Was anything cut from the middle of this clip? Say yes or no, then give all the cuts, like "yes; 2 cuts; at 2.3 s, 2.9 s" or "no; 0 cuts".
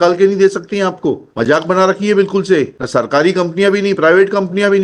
yes; 2 cuts; at 1.3 s, 2.8 s